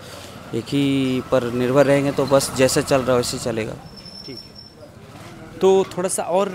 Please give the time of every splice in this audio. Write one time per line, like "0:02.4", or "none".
none